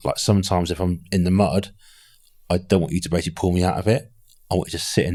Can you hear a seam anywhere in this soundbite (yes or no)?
no